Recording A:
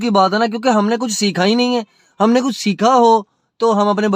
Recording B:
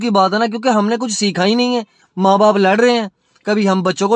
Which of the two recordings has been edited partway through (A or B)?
B